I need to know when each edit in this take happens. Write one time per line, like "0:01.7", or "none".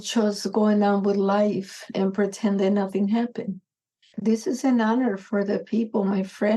0:04.1